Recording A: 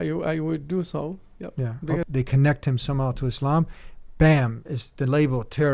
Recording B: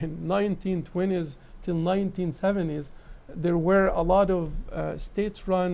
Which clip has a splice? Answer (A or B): A